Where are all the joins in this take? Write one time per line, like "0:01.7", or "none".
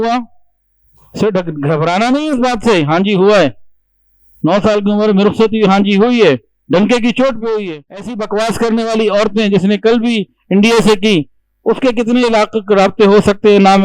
0:08.2